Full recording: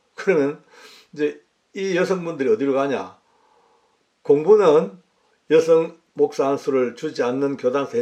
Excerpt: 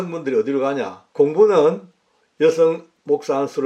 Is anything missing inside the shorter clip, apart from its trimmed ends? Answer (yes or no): yes